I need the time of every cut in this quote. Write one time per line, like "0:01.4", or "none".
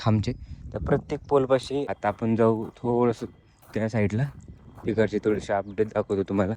0:01.9